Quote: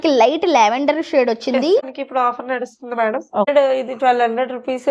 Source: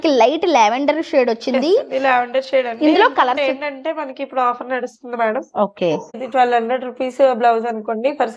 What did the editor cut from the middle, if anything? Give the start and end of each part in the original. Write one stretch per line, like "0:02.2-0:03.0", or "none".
0:01.9-0:04.1
0:05.8-0:05.9